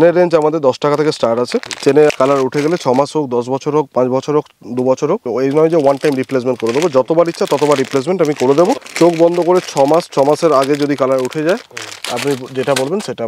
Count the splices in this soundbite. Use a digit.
3